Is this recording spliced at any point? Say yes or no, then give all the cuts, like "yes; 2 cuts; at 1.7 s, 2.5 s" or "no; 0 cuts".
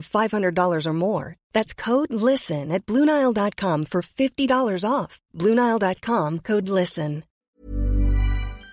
yes; 1 cut; at 7.4 s